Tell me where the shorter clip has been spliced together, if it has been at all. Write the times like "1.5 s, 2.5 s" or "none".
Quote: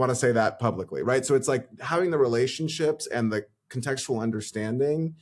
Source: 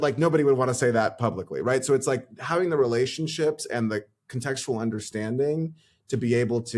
none